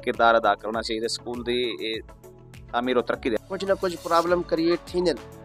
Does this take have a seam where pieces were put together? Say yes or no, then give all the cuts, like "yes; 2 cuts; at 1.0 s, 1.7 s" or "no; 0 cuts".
yes; 1 cut; at 3.4 s